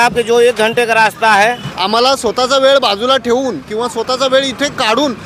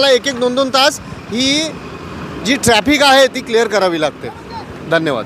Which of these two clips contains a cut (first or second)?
first